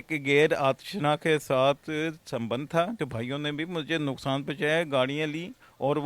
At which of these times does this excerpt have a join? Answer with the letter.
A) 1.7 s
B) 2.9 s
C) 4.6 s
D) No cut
B